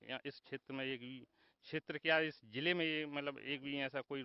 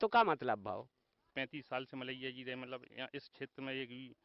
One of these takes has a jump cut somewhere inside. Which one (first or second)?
second